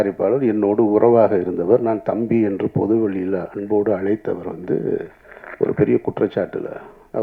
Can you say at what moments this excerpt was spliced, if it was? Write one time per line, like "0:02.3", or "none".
none